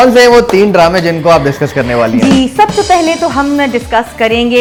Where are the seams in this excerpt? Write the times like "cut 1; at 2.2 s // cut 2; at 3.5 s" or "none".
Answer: none